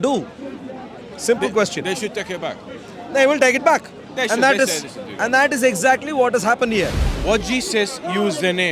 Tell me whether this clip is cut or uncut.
cut